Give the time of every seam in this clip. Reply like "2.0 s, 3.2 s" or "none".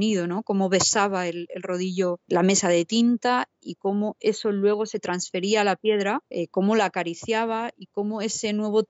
2.3 s, 6.3 s